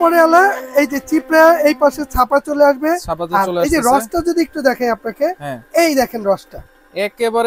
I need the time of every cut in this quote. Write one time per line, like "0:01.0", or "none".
none